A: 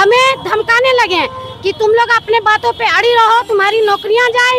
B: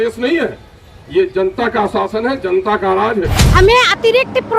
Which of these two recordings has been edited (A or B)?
B